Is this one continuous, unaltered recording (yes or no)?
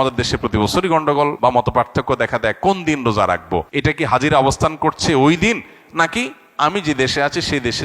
no